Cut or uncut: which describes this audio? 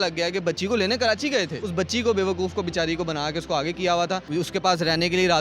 cut